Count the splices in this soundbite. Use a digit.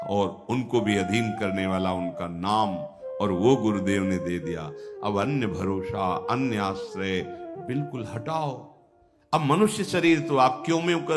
1